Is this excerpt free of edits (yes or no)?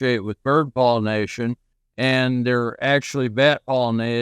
yes